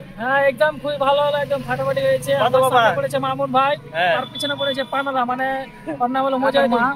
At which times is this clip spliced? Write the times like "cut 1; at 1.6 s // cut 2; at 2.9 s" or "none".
none